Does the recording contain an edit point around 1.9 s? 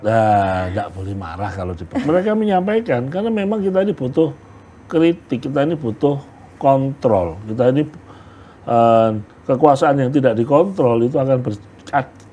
yes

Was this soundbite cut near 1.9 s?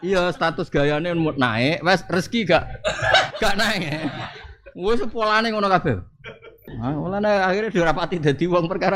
no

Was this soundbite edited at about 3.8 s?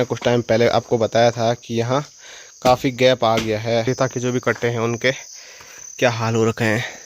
yes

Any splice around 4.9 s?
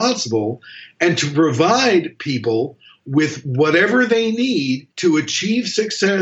yes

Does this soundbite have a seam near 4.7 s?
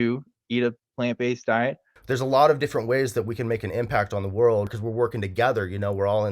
yes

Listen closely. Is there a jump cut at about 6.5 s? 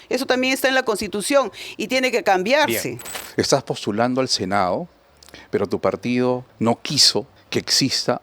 yes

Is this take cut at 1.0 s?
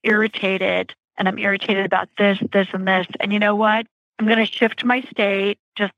yes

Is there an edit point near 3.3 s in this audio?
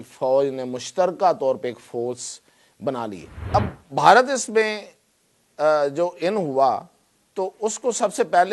yes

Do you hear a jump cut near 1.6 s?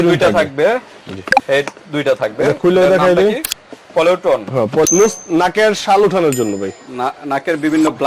no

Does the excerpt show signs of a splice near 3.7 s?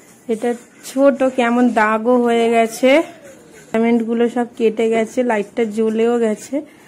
yes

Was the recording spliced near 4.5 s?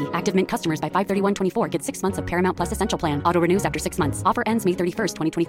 no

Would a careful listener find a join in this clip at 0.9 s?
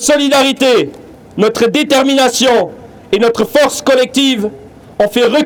no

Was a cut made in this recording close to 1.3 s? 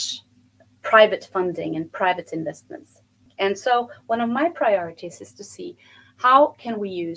no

